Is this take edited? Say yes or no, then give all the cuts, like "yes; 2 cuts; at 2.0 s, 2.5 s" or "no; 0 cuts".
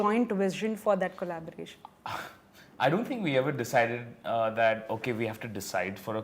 no; 0 cuts